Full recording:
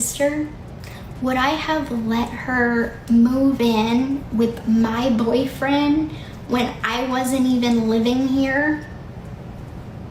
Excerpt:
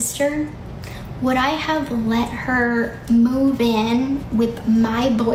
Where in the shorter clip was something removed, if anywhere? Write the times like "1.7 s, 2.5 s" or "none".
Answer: none